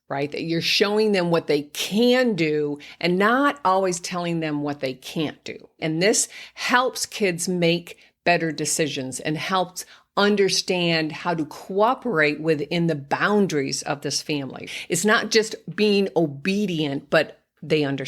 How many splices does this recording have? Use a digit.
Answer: 2